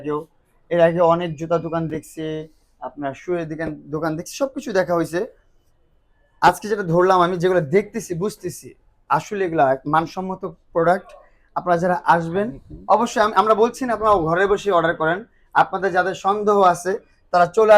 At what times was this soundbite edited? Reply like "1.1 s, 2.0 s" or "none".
none

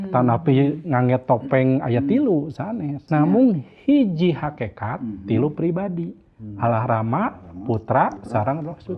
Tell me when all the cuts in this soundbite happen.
3.0 s

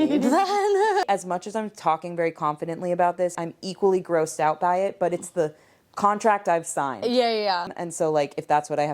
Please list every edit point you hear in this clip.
1.0 s, 3.4 s, 7.7 s

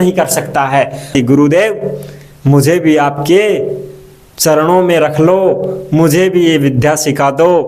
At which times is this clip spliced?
1.1 s

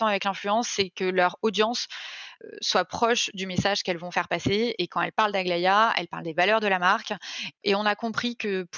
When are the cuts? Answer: 2.3 s, 7.6 s

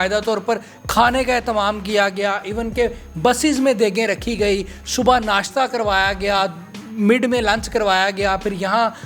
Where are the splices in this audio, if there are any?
none

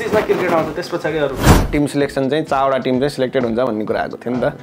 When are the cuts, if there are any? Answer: 1.5 s

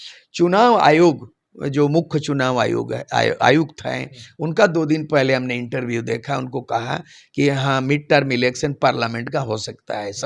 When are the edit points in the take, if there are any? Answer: none

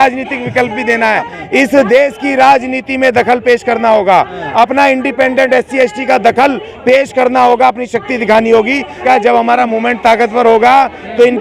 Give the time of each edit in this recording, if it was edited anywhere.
1.4 s, 9.0 s

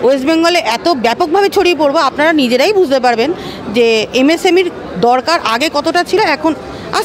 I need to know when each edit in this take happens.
none

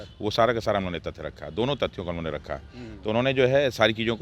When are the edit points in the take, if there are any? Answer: none

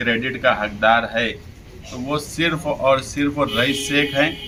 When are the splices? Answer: none

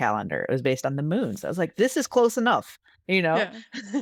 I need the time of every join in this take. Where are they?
none

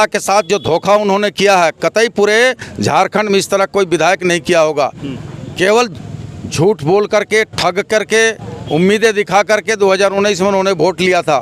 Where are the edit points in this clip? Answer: none

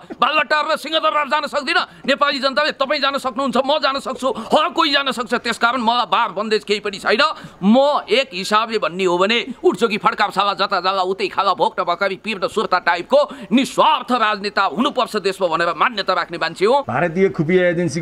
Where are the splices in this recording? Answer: 16.9 s

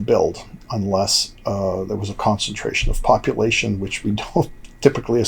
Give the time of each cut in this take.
none

